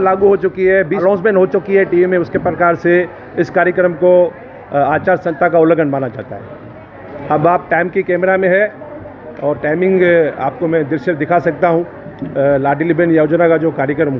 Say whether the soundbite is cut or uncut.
cut